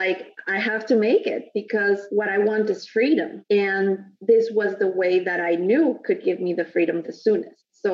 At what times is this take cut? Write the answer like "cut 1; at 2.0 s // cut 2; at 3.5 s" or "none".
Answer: cut 1; at 2.0 s // cut 2; at 3.3 s